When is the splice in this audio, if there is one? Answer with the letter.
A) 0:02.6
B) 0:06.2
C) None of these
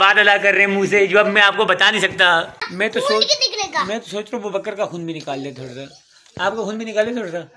A